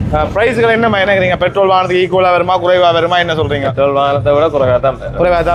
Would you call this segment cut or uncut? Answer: uncut